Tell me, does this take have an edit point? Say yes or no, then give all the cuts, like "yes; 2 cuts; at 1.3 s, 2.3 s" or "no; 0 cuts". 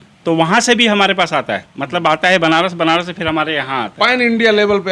no; 0 cuts